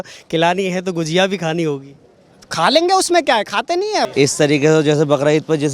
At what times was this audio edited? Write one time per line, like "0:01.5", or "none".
0:04.0